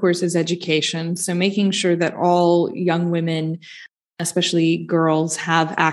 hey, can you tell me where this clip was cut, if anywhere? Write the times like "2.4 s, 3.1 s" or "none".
none